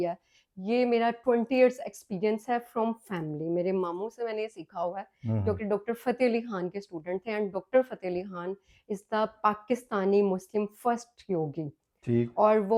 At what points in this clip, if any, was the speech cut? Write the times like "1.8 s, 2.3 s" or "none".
none